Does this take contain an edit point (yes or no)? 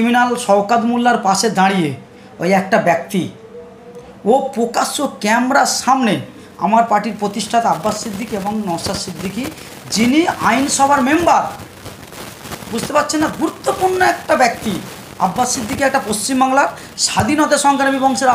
no